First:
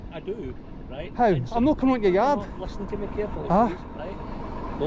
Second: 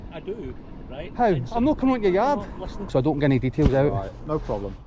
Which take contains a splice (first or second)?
second